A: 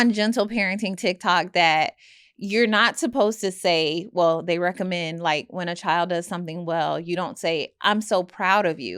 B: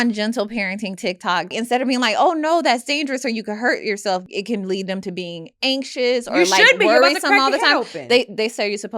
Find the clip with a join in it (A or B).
B